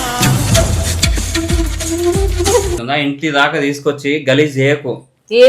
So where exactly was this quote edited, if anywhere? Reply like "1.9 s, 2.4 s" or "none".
2.8 s